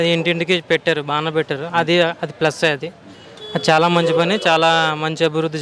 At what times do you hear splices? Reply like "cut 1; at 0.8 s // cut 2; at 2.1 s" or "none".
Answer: none